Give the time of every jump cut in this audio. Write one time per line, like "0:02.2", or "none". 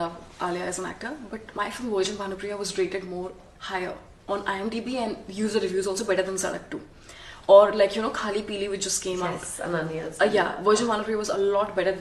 0:01.5

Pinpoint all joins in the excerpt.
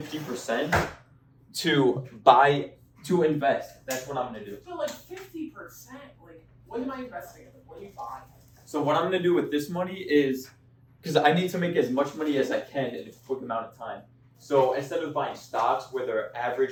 none

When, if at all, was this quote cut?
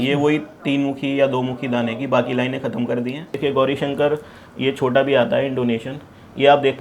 0:03.3

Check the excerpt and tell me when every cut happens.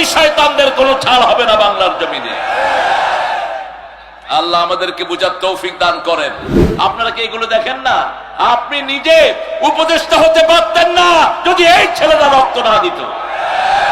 0:06.6

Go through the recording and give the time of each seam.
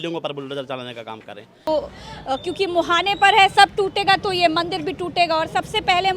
0:01.7

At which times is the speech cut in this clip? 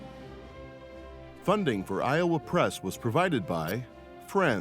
0:01.4

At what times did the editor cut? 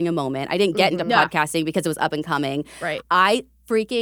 0:03.0

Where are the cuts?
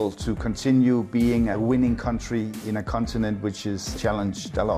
0:01.5
0:02.6
0:03.9

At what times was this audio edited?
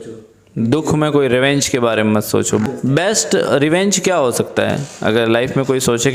0:02.7

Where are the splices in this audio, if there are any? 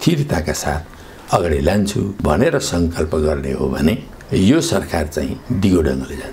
0:02.1
0:05.4

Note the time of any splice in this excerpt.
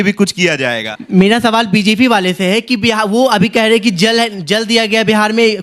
0:00.9

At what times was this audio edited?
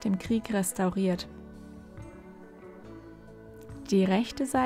none

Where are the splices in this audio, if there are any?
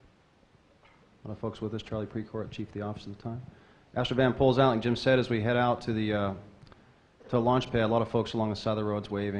0:00.9

